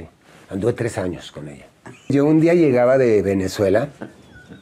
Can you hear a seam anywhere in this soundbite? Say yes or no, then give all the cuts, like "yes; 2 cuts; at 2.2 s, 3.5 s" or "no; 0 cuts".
yes; 1 cut; at 2.1 s